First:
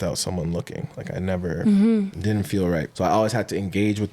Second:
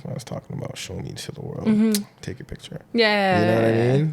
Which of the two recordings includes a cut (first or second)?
first